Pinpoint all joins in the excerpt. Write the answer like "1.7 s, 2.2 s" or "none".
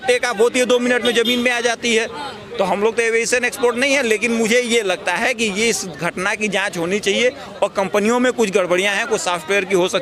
none